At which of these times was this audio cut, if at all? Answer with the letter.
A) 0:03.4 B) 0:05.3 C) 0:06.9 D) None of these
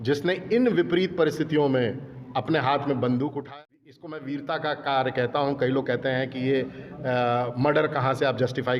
A